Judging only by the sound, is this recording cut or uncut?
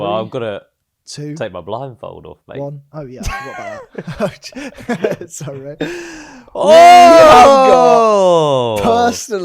uncut